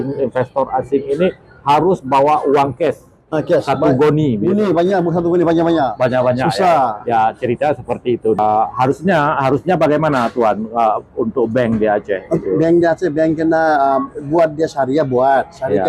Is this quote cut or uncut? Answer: cut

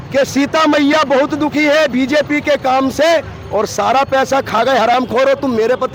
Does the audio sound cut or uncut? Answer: uncut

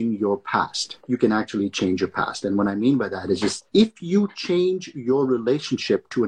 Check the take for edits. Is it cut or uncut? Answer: uncut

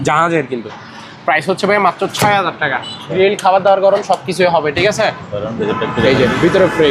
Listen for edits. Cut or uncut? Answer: cut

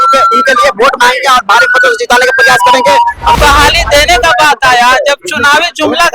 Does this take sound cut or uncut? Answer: cut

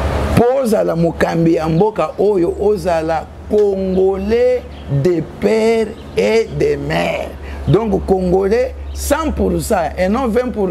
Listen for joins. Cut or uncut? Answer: uncut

